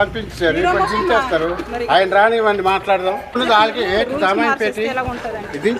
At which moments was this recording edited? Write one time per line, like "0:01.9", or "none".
0:03.3